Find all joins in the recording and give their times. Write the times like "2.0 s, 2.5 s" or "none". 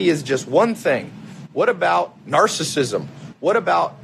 none